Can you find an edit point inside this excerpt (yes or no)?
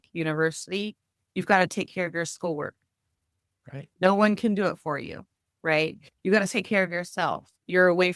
no